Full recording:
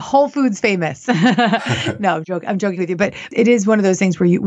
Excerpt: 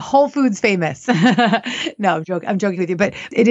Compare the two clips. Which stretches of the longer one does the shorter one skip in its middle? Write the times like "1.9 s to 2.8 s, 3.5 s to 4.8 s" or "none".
none